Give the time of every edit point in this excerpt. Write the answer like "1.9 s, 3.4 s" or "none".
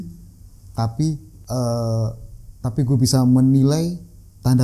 1.3 s